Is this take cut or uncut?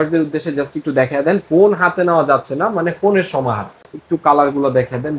cut